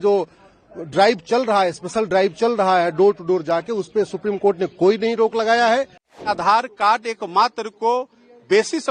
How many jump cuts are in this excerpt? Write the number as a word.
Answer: one